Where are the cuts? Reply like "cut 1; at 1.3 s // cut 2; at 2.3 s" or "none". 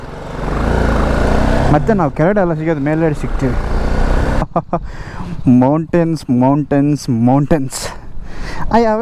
cut 1; at 4.4 s

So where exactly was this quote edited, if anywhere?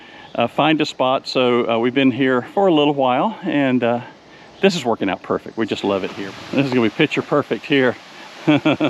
cut 1; at 6.2 s

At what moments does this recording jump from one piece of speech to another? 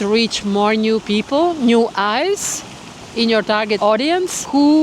none

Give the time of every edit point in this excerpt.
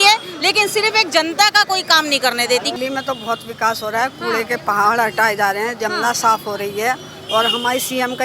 cut 1; at 2.7 s

